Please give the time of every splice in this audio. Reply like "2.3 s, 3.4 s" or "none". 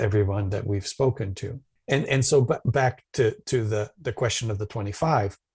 none